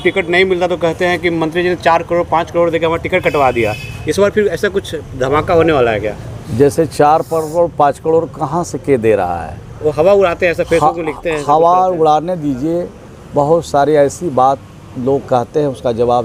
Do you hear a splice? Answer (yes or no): no